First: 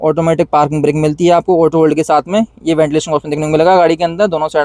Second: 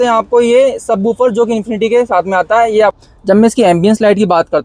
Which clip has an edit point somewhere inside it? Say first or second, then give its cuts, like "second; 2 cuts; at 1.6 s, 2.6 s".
second; 1 cut; at 3.0 s